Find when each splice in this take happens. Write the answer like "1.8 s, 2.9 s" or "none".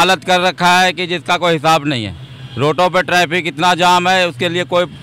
none